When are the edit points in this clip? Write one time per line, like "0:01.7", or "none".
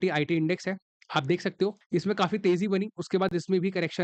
0:01.8

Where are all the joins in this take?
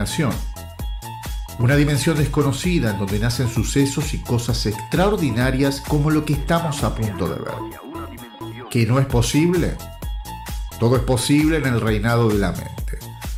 none

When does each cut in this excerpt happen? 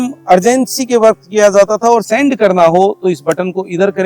0:02.1

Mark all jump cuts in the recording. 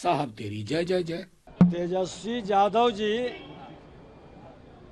0:01.3

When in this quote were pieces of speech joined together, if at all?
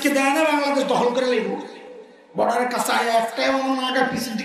none

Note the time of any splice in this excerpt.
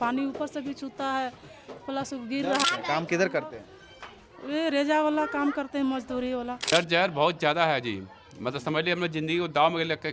0:02.6
0:06.7

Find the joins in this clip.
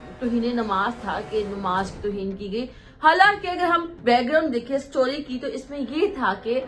none

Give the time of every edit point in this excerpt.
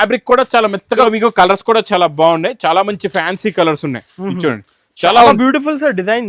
0:01.0

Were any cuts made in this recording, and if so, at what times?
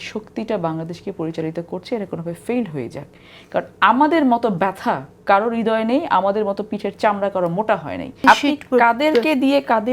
0:08.2

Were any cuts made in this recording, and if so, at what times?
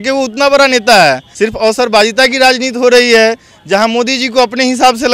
0:01.3

